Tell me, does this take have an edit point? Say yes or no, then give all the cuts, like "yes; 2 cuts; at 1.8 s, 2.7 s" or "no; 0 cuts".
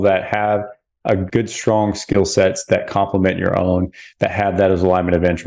no; 0 cuts